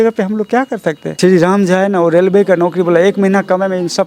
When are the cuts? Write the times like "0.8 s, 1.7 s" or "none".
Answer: 1.1 s